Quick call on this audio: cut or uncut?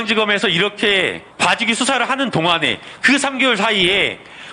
cut